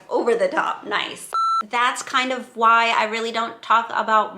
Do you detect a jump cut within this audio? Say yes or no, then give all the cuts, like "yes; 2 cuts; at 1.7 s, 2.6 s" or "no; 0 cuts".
yes; 1 cut; at 1.6 s